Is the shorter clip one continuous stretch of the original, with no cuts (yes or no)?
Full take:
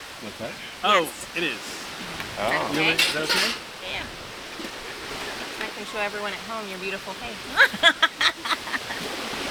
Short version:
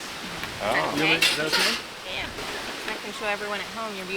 no